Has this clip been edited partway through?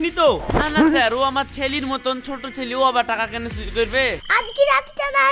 yes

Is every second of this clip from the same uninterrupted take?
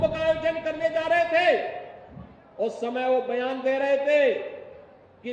yes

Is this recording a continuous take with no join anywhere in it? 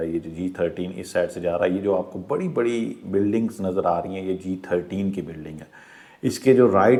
yes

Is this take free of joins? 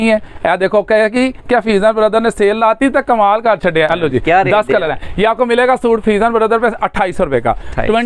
yes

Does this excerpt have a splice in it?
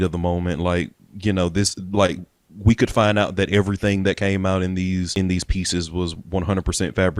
yes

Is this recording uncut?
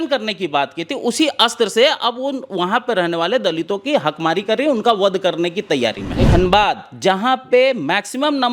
no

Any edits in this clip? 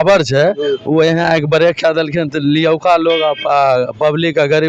no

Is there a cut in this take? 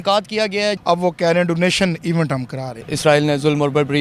yes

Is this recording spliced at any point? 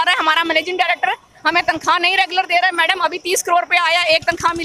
no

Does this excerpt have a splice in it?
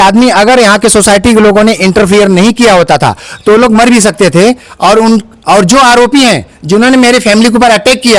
yes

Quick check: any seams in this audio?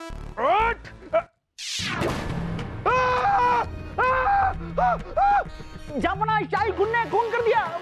yes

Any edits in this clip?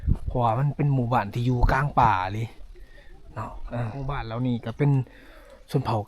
no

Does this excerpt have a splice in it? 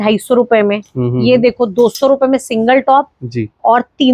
no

